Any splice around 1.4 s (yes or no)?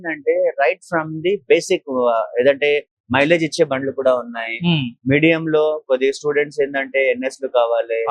no